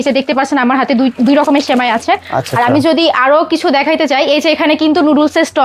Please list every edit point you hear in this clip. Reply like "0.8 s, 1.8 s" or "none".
none